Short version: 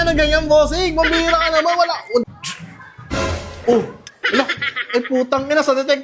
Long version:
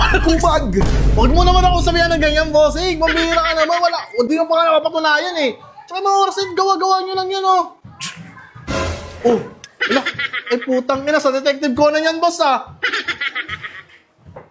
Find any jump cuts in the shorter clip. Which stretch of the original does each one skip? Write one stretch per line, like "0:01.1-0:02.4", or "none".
0:04.3-0:07.8